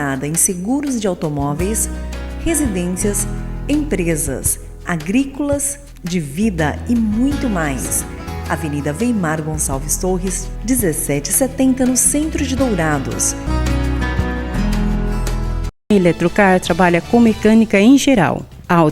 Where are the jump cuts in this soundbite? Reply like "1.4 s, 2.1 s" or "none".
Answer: 15.8 s

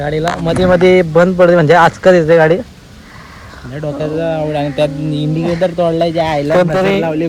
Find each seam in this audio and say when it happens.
none

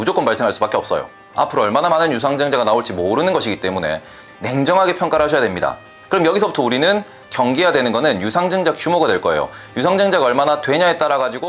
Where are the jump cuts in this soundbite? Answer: 1.2 s, 4.2 s, 5.9 s

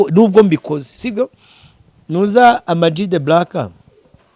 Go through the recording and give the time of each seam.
none

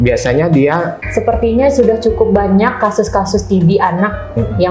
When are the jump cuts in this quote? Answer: 1.0 s

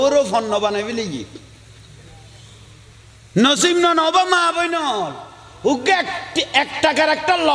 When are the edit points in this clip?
none

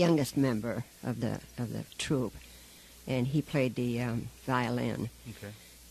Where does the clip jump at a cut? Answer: 0.9 s

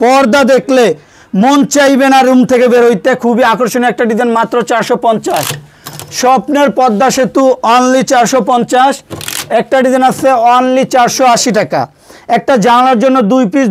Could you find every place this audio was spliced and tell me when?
none

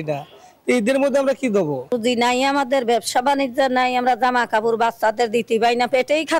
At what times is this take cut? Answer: 1.9 s

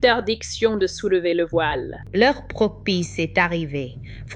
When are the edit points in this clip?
1.9 s

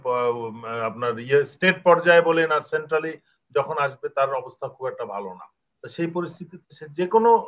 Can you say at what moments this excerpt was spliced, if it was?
none

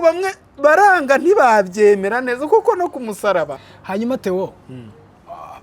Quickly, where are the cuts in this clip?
3.6 s

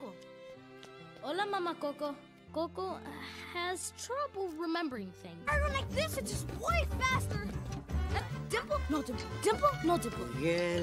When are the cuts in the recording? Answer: 2.3 s

